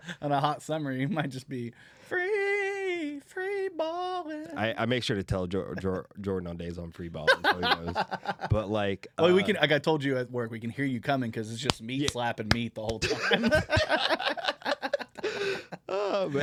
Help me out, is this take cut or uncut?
uncut